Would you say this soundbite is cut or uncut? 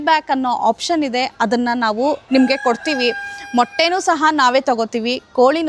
uncut